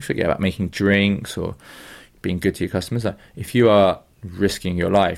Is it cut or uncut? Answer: cut